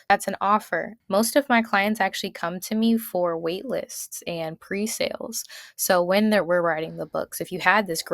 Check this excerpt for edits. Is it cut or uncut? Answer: cut